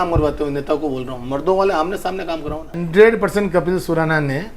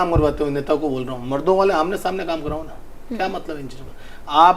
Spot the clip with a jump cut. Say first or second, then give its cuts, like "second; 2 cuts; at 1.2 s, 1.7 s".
first; 1 cut; at 2.8 s